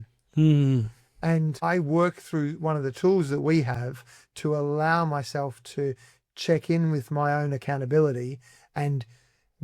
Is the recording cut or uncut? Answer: cut